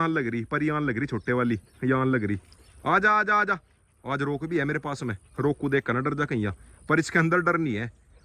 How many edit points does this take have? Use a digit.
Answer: 0